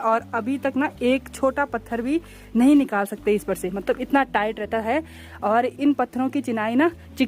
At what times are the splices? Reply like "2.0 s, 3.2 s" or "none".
none